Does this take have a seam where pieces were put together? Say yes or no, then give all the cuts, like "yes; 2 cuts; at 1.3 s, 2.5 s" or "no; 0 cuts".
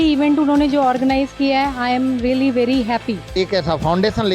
yes; 1 cut; at 3.2 s